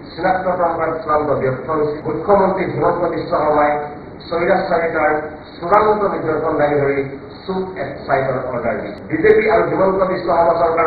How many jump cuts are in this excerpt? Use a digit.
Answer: 2